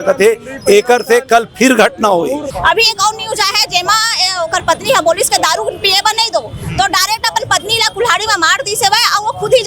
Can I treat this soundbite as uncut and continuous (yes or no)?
no